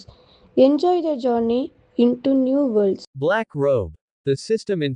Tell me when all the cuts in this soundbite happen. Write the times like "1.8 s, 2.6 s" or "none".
3.1 s

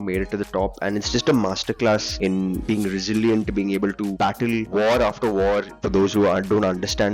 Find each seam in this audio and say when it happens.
5.8 s

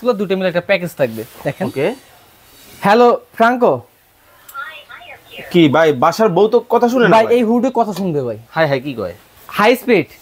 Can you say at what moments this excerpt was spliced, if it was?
1.4 s

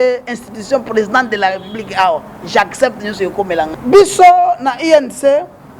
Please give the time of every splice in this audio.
3.7 s

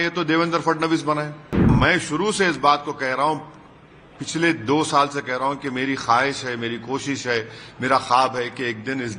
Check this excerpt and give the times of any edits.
1.7 s

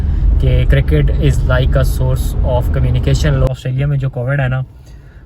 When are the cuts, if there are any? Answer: 3.5 s

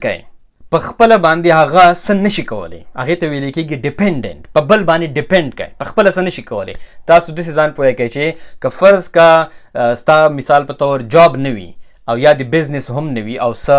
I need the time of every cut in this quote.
none

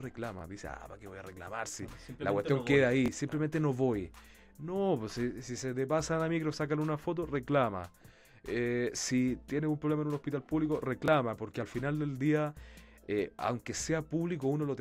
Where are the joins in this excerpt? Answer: none

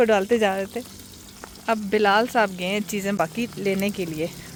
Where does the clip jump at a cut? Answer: none

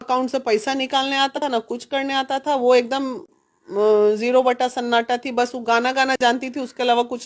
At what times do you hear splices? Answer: 1.4 s

